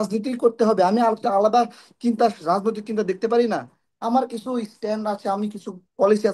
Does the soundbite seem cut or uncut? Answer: uncut